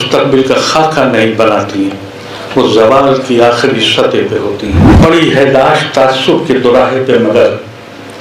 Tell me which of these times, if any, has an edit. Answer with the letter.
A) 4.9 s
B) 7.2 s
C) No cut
A